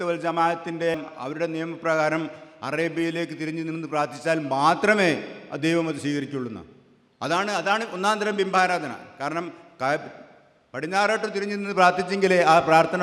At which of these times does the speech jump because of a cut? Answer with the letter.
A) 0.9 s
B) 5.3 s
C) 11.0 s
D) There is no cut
A